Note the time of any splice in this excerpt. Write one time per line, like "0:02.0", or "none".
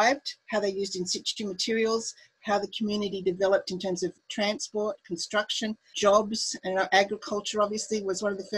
0:04.2
0:05.9